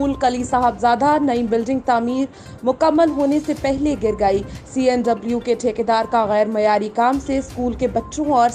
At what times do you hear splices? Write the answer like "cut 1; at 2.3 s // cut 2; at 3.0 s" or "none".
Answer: none

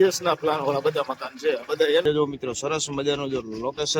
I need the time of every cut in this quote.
cut 1; at 2.0 s

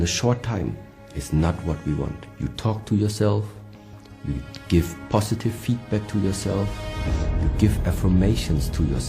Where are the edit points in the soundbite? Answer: cut 1; at 2.2 s

